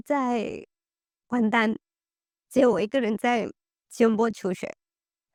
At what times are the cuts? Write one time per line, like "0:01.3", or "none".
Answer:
none